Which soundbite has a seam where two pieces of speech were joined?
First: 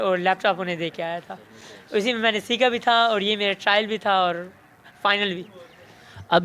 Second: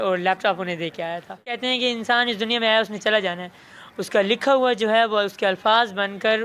second; 1 cut; at 1.6 s

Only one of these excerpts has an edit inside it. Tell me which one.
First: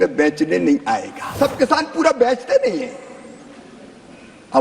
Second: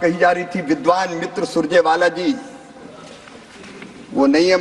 first; 1 cut; at 1.3 s

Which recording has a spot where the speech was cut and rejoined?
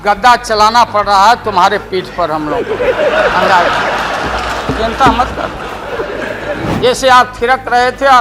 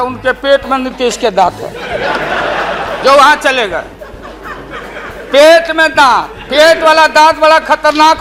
first; 1 cut; at 6.7 s

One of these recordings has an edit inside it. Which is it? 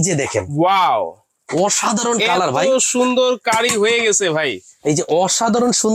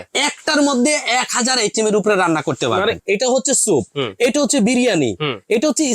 second; 1 cut; at 3.0 s

